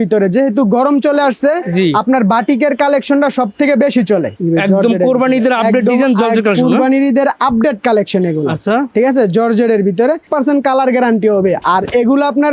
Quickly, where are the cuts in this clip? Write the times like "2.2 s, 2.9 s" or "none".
4.3 s, 10.3 s